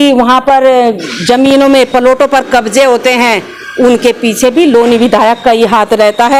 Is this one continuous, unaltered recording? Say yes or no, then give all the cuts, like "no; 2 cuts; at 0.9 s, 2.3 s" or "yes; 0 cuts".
yes; 0 cuts